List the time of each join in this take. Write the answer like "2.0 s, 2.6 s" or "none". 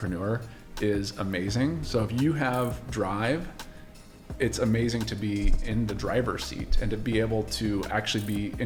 none